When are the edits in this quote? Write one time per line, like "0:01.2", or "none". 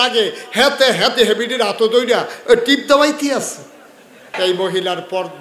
0:04.3